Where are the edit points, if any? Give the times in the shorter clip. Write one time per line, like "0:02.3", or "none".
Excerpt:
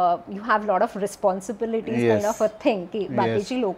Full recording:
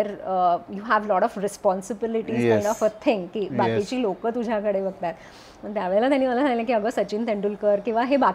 none